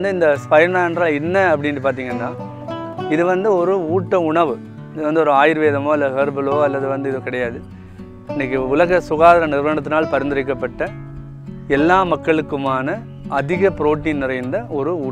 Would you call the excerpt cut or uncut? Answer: uncut